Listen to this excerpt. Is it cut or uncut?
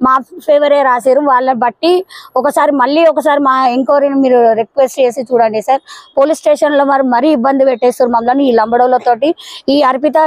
uncut